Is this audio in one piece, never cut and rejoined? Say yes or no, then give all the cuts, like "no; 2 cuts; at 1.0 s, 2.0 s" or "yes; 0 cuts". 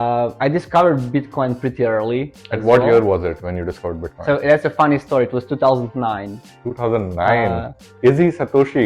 yes; 0 cuts